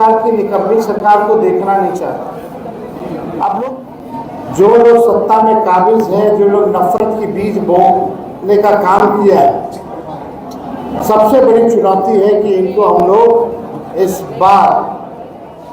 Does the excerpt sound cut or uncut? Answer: cut